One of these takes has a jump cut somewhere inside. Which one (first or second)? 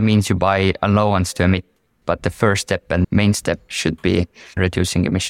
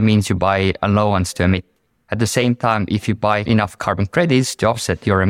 first